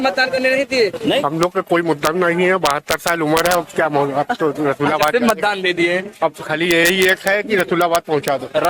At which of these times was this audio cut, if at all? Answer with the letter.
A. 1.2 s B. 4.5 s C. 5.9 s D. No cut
A